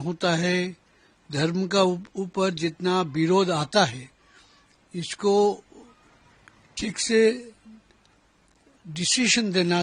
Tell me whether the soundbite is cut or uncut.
uncut